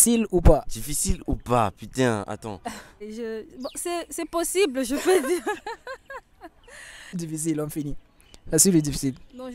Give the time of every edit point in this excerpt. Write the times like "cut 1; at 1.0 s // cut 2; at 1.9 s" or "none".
cut 1; at 3.0 s // cut 2; at 7.2 s